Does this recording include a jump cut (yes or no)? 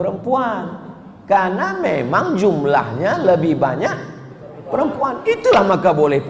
no